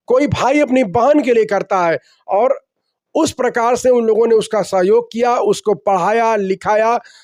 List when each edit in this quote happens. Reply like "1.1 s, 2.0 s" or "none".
none